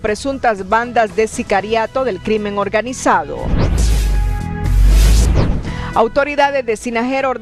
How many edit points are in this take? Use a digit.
0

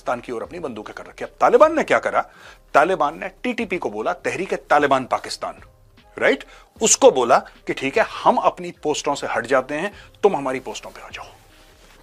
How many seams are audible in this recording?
0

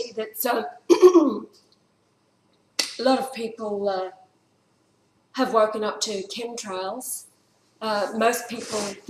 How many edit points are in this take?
1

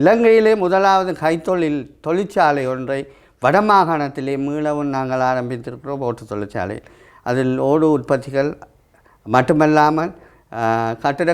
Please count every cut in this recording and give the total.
0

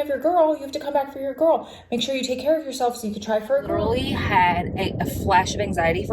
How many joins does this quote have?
1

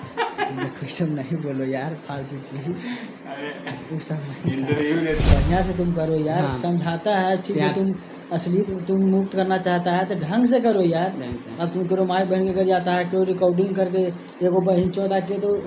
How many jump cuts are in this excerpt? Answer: 1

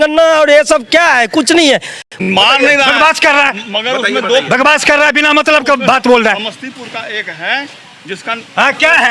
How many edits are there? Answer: 1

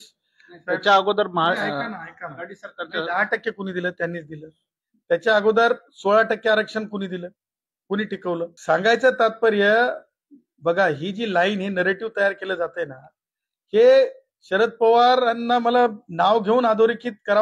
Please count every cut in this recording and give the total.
1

